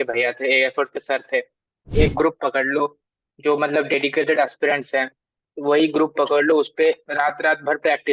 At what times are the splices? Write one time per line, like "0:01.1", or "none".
0:01.9